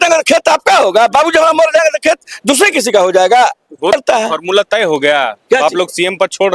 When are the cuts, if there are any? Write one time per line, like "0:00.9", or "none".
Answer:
0:03.9